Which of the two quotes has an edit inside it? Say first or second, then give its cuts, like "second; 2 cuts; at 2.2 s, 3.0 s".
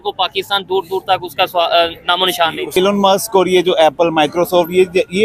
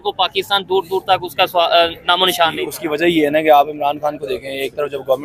first; 1 cut; at 2.8 s